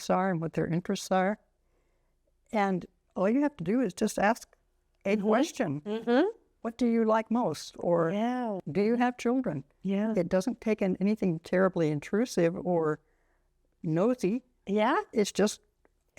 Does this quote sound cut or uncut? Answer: cut